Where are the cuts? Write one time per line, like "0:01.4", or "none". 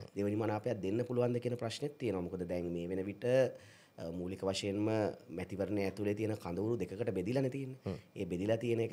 none